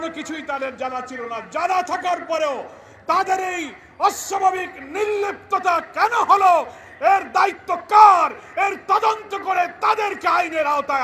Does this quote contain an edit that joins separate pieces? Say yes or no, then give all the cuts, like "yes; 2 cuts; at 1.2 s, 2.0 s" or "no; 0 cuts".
no; 0 cuts